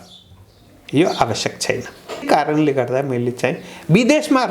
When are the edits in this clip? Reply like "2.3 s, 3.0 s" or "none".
2.2 s